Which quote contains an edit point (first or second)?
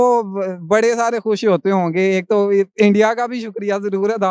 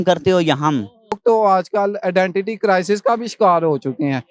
second